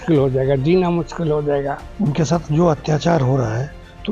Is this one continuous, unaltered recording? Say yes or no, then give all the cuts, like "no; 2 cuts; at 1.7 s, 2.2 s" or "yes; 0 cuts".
no; 1 cut; at 1.8 s